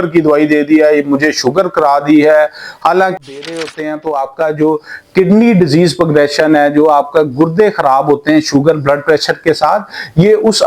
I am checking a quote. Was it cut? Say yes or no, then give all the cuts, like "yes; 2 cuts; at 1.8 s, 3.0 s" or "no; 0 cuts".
yes; 1 cut; at 3.2 s